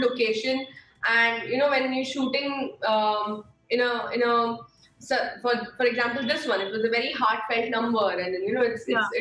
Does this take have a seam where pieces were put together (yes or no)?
no